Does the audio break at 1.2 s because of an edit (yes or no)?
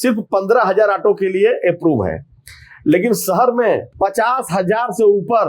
no